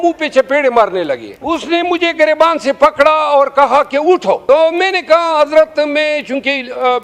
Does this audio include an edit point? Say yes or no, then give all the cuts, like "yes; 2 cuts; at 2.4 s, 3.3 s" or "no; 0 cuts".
yes; 2 cuts; at 1.3 s, 4.4 s